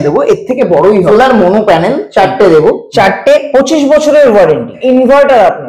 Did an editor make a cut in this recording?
yes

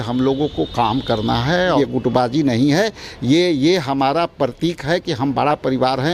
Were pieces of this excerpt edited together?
yes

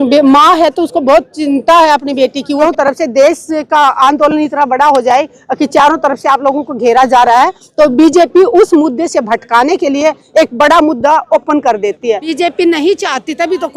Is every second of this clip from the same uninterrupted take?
no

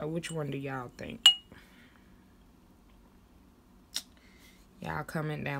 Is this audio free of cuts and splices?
yes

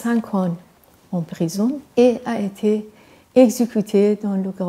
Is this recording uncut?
no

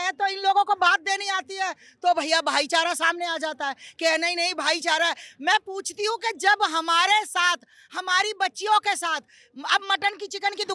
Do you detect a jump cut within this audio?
no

